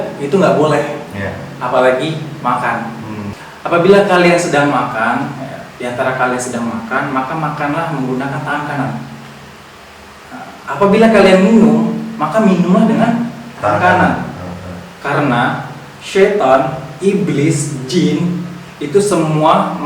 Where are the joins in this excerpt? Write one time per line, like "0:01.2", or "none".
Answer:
0:03.3